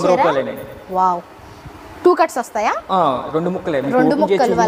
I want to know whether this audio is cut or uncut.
uncut